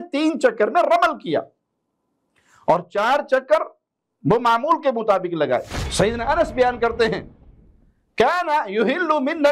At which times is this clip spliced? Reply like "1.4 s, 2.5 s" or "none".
5.8 s